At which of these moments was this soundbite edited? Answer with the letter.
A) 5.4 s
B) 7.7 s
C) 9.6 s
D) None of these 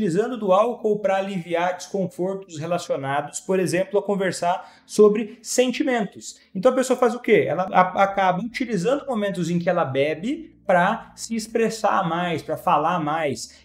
B